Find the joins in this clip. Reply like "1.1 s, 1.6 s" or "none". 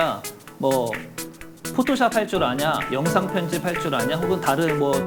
none